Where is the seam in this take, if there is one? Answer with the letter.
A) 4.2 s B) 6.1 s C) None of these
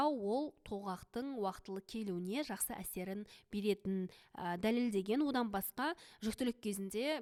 C